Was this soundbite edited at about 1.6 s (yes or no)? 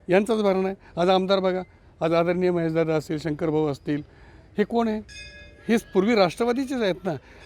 no